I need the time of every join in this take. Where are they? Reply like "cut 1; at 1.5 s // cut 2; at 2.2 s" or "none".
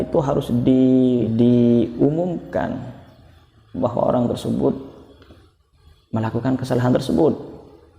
cut 1; at 1.3 s